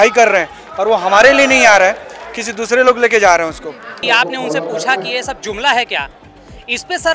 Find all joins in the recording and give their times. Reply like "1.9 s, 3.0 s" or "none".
4.0 s